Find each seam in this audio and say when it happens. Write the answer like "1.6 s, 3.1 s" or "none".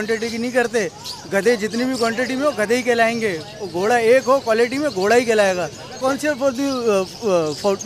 6.0 s